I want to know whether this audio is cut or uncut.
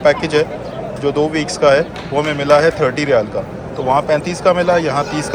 uncut